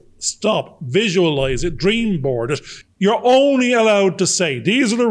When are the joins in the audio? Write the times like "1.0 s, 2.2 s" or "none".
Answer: 2.7 s